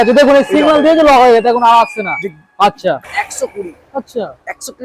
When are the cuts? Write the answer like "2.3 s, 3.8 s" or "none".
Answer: 3.0 s